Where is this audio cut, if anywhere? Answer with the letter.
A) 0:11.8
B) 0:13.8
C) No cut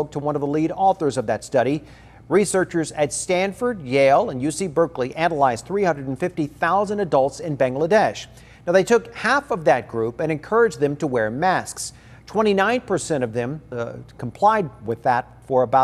B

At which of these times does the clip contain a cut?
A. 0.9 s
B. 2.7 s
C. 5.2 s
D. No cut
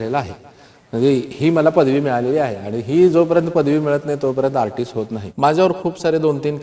C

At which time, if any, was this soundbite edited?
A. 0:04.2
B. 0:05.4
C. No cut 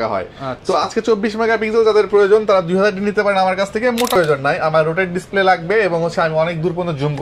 A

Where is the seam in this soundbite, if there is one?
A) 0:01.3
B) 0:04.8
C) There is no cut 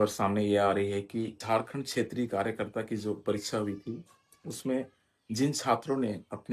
A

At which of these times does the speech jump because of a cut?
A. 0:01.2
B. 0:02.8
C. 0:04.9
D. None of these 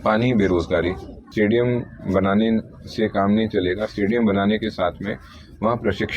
A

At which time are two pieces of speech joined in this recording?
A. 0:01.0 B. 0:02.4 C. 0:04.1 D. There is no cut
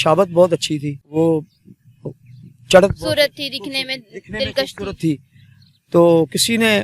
A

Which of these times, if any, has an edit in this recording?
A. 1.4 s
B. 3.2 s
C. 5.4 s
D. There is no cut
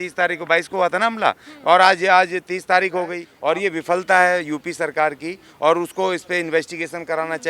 B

